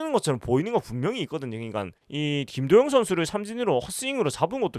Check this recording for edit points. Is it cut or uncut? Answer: cut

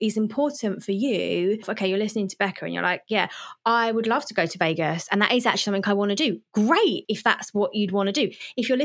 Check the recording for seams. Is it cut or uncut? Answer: cut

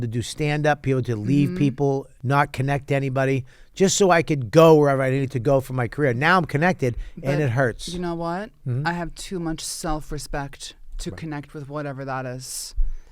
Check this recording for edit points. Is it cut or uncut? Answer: cut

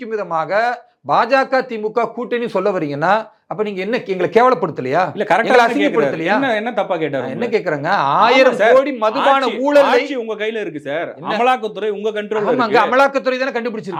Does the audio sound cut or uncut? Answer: uncut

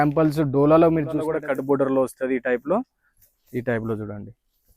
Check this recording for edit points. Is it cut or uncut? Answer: cut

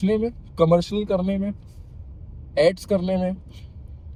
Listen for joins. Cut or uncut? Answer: uncut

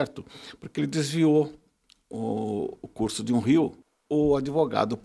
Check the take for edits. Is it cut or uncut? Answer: cut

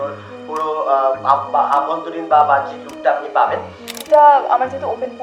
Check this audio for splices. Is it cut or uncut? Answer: cut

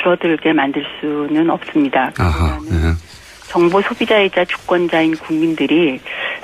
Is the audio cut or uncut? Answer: cut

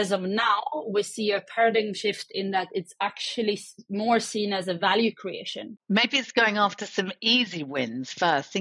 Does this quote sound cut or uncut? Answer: cut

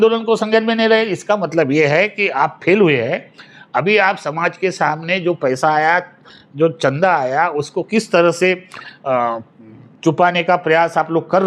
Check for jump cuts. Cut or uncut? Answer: uncut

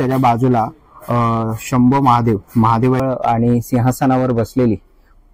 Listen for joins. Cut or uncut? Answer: cut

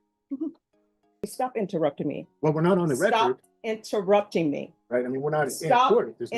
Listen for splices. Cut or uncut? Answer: cut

